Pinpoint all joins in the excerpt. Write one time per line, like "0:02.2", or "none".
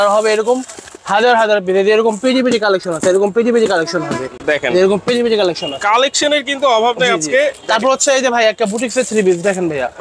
none

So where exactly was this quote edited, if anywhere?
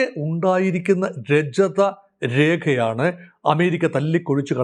none

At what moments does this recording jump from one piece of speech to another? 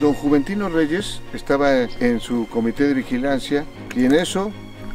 0:01.9
0:03.8

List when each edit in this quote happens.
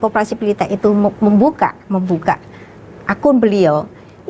none

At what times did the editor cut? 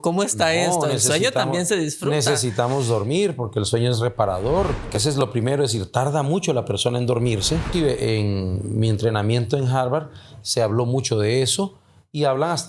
0:04.9
0:07.7

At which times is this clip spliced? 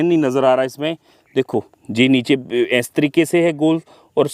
none

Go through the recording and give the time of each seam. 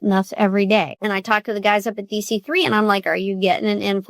0:00.9

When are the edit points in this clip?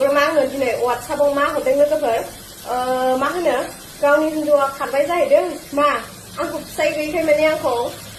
none

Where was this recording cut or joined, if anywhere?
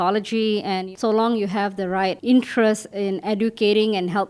0:00.9
0:02.2

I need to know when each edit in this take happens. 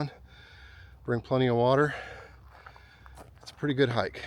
none

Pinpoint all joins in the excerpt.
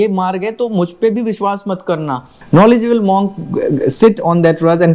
0:02.3

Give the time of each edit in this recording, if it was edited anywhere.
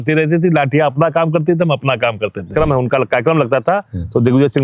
0:02.5

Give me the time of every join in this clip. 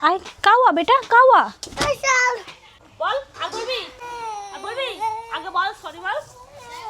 0:04.0

